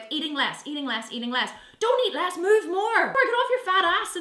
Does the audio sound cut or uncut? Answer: cut